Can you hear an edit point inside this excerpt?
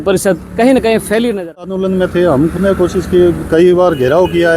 yes; 1 cut; at 1.8 s

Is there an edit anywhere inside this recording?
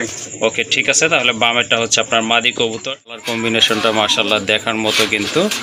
yes; 1 cut; at 3.2 s

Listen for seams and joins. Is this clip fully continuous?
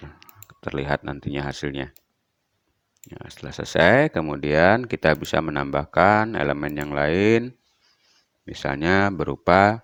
yes; 0 cuts

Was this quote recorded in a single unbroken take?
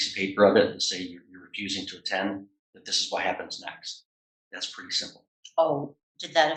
yes; 0 cuts

